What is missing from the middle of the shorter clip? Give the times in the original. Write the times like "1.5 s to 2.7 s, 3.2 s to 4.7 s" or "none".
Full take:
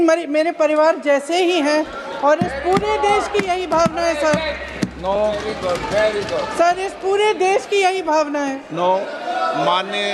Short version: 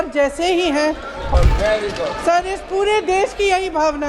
2.2 s to 5.6 s